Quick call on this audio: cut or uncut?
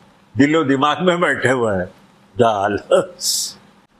uncut